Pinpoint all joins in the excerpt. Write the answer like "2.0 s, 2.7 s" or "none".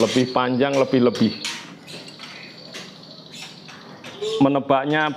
4.1 s